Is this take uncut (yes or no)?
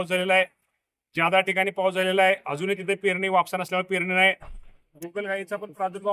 no